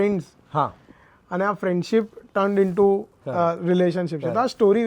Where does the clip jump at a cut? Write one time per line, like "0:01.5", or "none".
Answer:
none